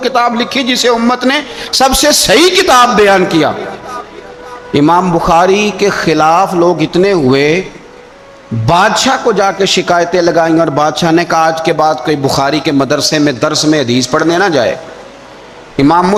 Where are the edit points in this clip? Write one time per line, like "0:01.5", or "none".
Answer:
none